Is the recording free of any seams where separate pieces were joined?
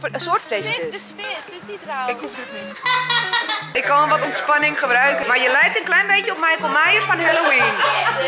no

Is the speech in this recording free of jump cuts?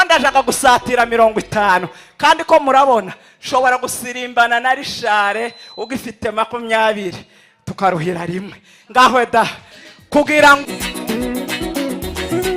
no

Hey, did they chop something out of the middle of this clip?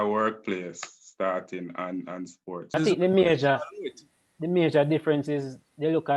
yes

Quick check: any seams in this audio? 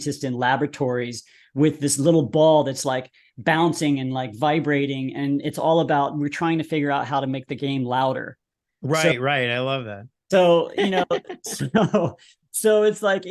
no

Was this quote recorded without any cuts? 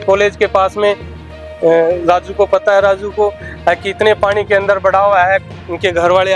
yes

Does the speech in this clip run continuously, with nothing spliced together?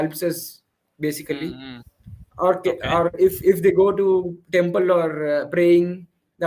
yes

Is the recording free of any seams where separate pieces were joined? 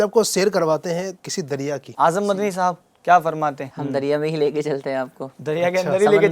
no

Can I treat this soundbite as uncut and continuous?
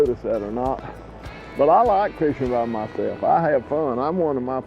no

